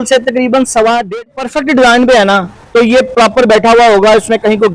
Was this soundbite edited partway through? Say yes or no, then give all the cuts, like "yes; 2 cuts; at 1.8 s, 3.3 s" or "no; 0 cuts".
yes; 1 cut; at 1.3 s